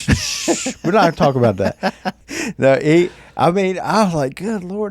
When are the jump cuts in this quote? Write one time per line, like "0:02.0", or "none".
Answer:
0:02.2